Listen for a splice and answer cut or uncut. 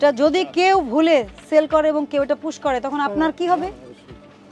uncut